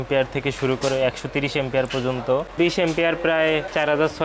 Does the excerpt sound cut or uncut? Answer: cut